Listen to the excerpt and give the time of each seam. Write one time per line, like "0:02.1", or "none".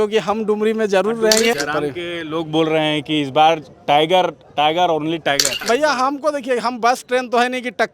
0:01.6
0:05.5